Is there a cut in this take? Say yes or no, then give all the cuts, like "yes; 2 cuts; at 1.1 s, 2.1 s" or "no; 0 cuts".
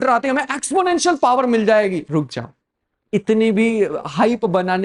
yes; 1 cut; at 2.0 s